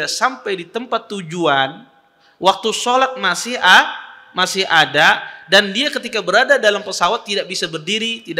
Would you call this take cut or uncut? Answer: uncut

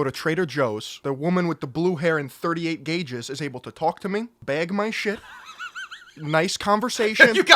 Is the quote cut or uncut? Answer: cut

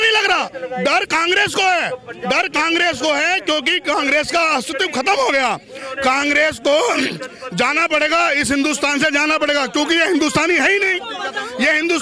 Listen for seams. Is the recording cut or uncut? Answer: uncut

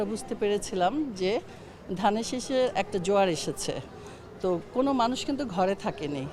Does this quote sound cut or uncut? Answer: uncut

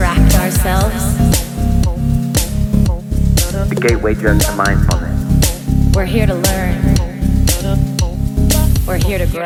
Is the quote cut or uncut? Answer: uncut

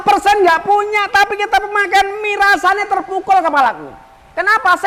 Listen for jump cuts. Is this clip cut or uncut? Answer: uncut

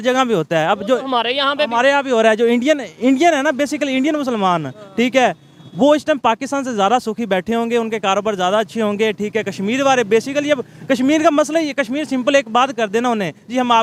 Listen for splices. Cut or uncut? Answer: uncut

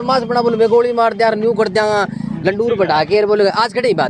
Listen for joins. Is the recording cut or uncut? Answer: uncut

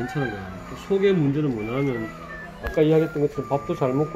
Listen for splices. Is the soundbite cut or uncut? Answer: uncut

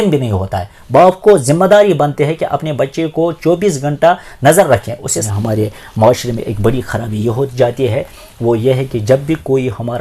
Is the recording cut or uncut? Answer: cut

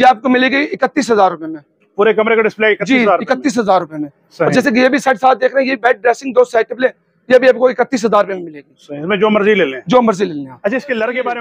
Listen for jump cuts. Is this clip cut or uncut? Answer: uncut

